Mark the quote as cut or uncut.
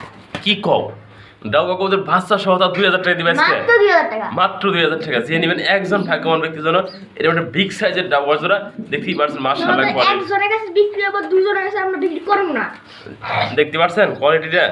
uncut